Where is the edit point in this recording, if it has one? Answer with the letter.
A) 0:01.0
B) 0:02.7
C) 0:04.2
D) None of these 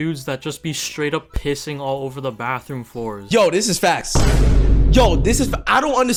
D